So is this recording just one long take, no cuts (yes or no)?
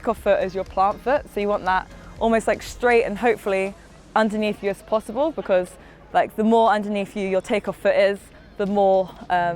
yes